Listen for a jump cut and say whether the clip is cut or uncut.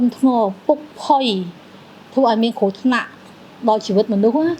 uncut